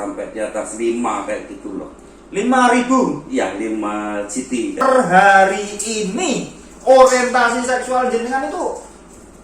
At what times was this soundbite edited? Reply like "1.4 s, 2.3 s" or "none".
4.8 s